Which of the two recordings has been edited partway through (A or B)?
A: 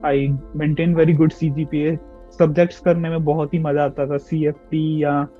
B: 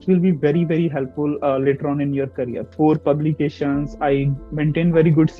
B